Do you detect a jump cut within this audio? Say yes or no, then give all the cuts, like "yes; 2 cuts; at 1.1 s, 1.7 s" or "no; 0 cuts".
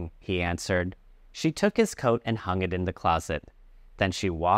yes; 1 cut; at 1.0 s